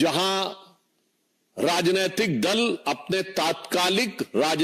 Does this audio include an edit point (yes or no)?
no